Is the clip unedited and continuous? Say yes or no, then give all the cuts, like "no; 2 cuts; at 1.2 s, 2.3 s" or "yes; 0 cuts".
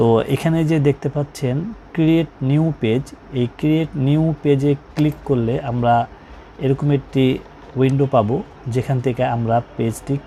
yes; 0 cuts